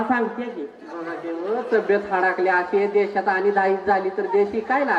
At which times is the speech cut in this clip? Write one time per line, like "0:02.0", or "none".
none

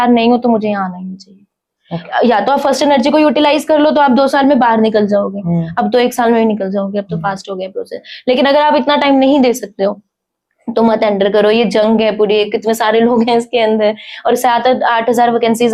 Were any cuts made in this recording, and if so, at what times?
none

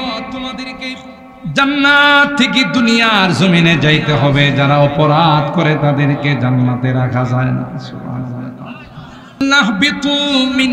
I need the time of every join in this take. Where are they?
0:09.4

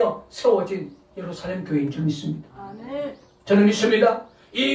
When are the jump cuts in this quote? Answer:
0:03.4

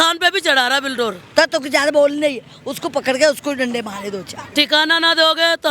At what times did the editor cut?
0:01.2
0:04.5

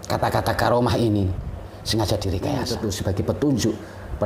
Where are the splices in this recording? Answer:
0:03.2

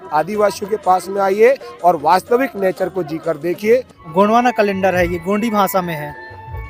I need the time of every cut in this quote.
0:04.0

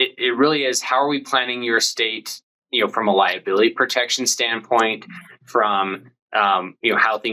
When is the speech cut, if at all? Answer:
none

